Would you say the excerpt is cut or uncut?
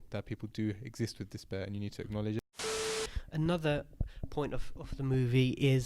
cut